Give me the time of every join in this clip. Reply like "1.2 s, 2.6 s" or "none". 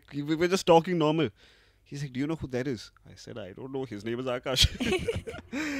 none

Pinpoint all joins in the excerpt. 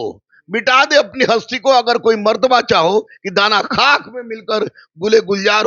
none

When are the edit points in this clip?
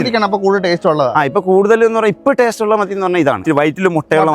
3.4 s

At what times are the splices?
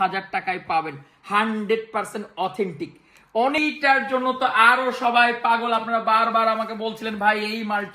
3.6 s

